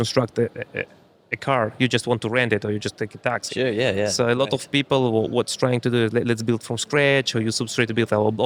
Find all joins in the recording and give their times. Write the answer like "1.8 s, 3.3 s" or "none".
none